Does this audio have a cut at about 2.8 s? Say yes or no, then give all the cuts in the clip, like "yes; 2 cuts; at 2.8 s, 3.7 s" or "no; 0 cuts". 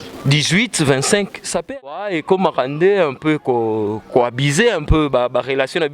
no; 1 cut; at 1.6 s